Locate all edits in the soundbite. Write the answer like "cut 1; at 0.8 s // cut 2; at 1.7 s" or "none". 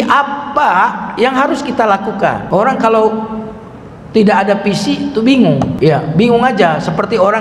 cut 1; at 2.4 s // cut 2; at 5.7 s